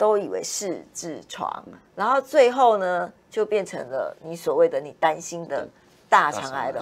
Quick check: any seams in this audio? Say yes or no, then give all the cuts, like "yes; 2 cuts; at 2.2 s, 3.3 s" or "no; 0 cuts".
no; 0 cuts